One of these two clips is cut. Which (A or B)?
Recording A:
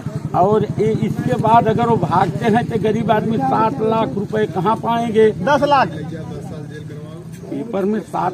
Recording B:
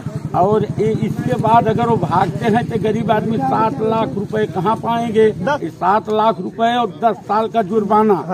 B